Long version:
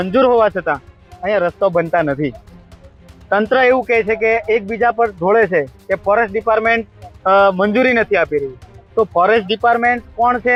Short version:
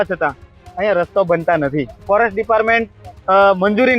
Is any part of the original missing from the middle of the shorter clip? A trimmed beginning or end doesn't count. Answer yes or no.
yes